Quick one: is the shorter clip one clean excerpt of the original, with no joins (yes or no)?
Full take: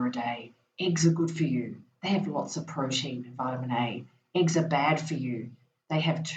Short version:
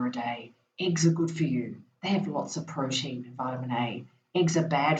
yes